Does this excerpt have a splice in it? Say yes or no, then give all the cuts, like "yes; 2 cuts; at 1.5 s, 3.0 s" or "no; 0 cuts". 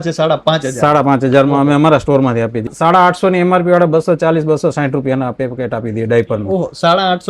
yes; 1 cut; at 2.7 s